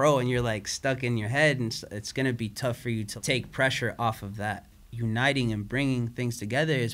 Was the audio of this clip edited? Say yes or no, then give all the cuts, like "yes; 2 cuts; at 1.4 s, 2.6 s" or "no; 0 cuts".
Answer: yes; 2 cuts; at 3.1 s, 4.7 s